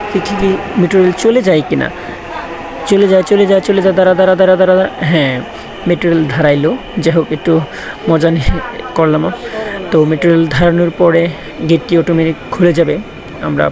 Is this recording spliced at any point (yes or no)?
no